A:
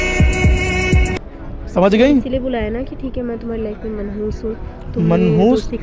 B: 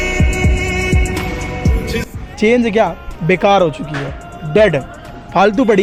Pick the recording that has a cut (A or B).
A